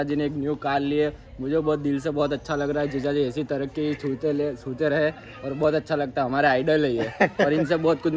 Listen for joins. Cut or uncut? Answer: uncut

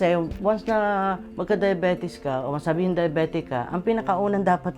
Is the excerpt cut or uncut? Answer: cut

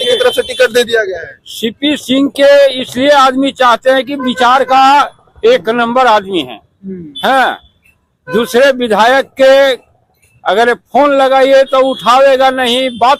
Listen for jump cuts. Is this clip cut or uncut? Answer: uncut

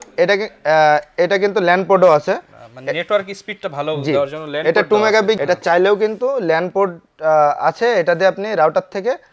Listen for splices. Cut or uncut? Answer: cut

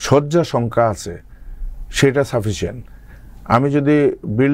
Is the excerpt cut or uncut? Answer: uncut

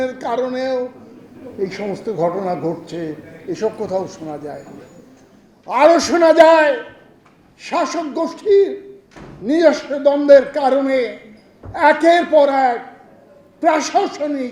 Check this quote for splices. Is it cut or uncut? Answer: uncut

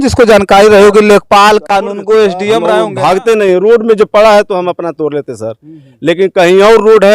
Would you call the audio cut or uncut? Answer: cut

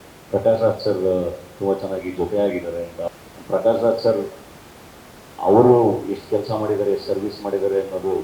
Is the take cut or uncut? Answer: cut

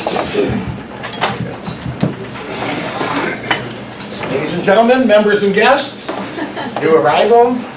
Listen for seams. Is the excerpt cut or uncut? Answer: uncut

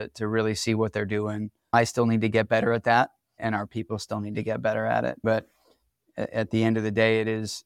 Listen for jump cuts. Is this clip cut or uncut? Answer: cut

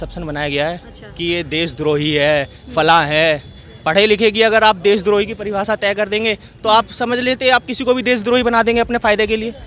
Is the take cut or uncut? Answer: uncut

